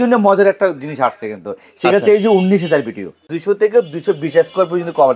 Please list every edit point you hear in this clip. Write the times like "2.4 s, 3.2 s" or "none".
3.3 s